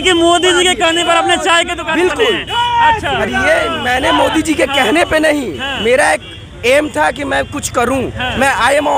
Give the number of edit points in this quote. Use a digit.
0